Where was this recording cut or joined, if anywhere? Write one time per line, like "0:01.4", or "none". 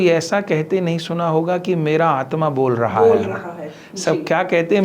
none